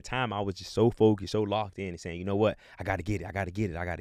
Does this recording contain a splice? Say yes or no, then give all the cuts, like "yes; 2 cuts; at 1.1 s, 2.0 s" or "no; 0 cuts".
no; 0 cuts